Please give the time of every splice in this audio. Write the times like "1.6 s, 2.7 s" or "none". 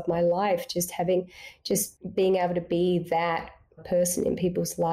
2.0 s, 3.8 s